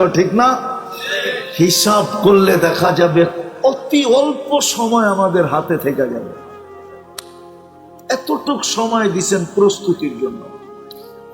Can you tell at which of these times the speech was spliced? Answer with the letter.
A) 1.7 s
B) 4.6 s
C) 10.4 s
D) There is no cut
C